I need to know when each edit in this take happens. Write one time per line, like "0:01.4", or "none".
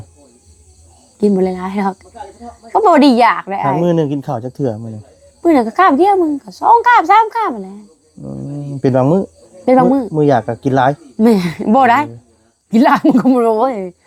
none